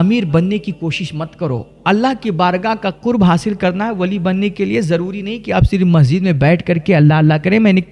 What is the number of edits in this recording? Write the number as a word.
one